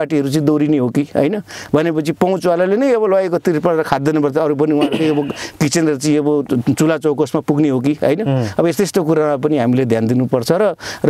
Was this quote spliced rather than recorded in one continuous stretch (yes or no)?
no